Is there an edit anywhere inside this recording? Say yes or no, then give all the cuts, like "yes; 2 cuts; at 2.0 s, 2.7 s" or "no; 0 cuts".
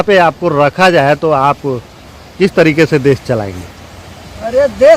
no; 0 cuts